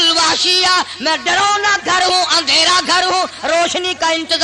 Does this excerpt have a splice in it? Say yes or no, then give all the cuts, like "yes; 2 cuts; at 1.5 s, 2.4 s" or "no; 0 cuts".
no; 0 cuts